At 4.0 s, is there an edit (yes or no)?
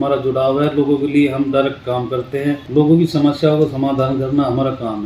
no